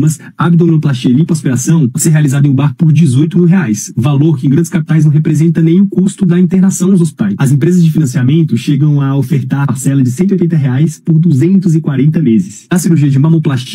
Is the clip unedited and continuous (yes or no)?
yes